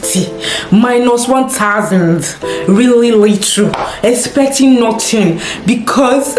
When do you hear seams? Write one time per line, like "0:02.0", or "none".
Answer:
none